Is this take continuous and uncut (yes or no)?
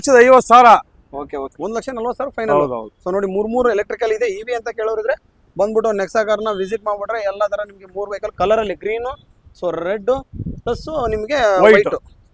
no